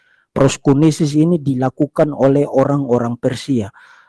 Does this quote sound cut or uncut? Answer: uncut